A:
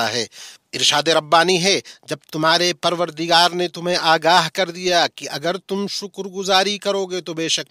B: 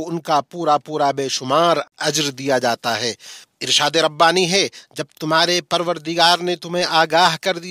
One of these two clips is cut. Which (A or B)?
B